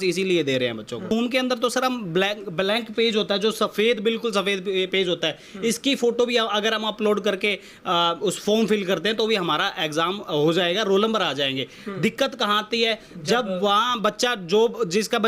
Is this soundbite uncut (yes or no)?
no